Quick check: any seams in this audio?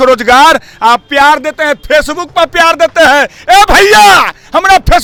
no; 0 cuts

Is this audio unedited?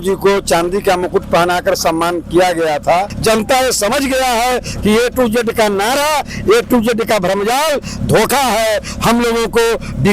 no; 1 cut; at 3.1 s

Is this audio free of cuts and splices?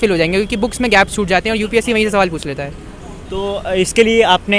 yes; 0 cuts

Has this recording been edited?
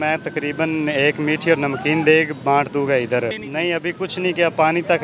yes; 1 cut; at 3.4 s

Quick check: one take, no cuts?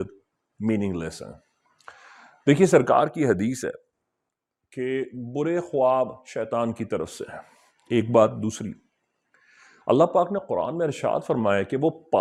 yes; 0 cuts

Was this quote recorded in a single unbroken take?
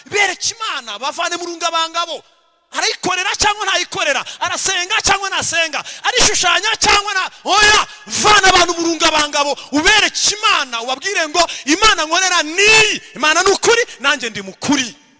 yes; 0 cuts

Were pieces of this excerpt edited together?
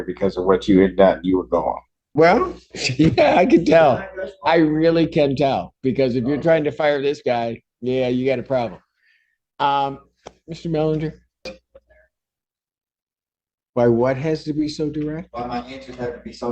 yes; 2 cuts; at 1.9 s, 11.5 s

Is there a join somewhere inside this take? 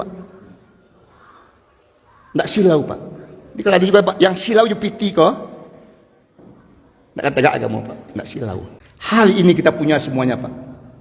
yes; 1 cut; at 8.7 s

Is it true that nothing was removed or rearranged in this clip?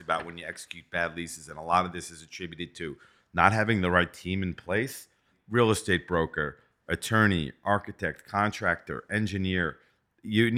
no; 1 cut; at 5.4 s

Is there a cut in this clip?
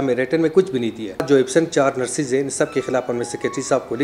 yes; 1 cut; at 1.2 s

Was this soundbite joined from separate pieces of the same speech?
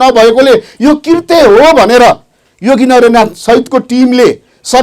no; 0 cuts

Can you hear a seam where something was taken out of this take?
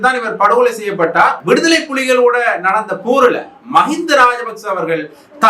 yes; 1 cut; at 1.4 s

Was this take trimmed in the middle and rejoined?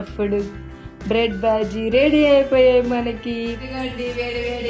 yes; 1 cut; at 3.6 s

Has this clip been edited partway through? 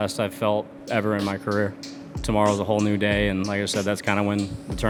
no; 0 cuts

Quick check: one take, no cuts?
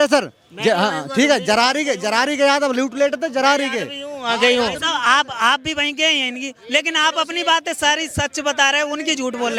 yes; 0 cuts

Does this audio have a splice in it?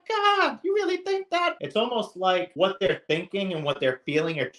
yes; 2 cuts; at 1.5 s, 2.5 s

